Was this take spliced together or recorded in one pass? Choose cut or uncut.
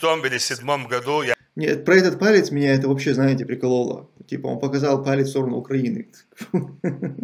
cut